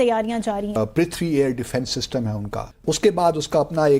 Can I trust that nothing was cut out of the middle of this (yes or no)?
no